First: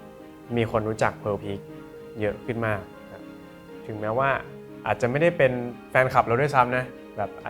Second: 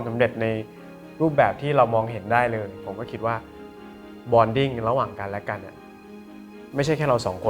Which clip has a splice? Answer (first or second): second